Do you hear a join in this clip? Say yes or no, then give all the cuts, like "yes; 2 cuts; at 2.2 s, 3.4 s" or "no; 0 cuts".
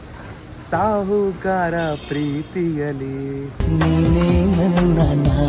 yes; 1 cut; at 3.6 s